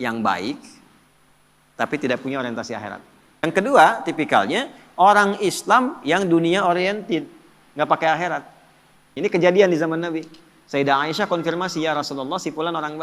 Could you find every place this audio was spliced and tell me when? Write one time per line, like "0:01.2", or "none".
0:03.4
0:09.1